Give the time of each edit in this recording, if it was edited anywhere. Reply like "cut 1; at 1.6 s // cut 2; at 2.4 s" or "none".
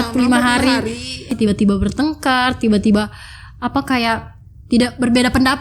cut 1; at 1.3 s